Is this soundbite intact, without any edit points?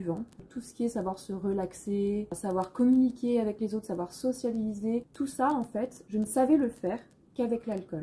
no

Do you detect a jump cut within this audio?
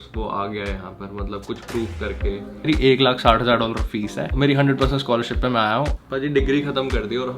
yes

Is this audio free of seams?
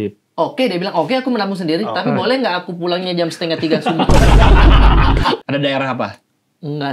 no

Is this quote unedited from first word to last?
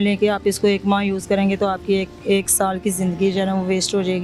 yes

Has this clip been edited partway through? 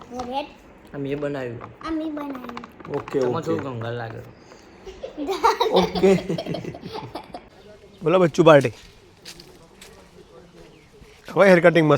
yes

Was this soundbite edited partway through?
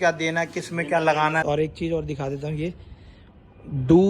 yes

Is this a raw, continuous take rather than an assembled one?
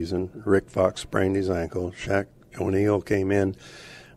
yes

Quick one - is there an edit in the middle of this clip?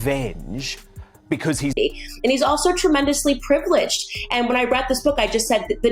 yes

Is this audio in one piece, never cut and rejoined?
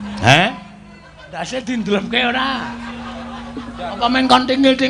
yes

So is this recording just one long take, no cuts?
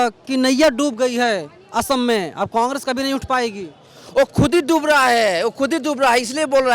yes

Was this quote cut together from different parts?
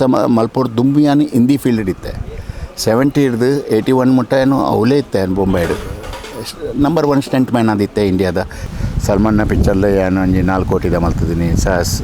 yes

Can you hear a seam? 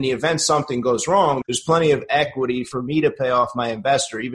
yes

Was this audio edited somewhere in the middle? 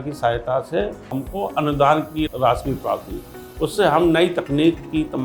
yes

